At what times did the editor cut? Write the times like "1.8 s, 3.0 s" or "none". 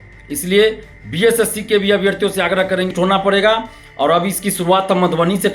2.9 s